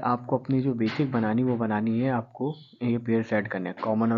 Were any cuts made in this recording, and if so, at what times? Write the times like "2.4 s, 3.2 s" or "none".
none